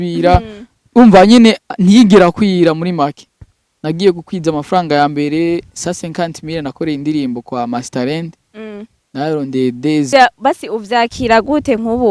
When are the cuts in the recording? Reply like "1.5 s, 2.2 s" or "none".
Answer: 10.1 s